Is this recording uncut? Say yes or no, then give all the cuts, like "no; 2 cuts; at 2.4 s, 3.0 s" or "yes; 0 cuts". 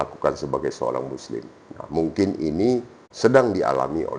no; 1 cut; at 3.0 s